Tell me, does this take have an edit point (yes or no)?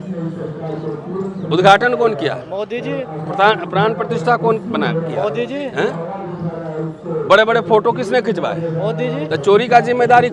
no